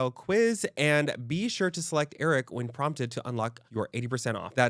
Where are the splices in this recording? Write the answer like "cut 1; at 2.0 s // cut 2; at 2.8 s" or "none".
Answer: none